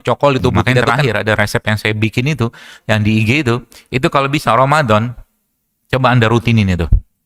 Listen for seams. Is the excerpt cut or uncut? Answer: cut